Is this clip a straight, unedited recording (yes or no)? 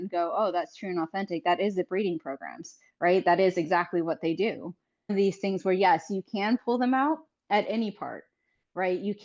no